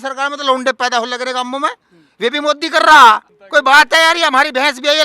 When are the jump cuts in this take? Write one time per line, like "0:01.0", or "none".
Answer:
0:03.3